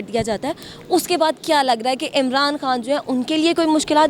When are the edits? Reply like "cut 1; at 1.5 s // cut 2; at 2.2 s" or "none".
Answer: none